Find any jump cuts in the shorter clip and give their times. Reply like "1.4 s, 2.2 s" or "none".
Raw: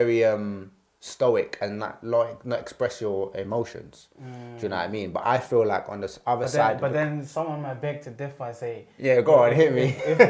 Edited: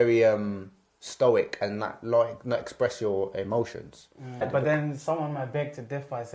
4.4 s